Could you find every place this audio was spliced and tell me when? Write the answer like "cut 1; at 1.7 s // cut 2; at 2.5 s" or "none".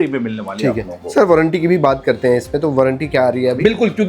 none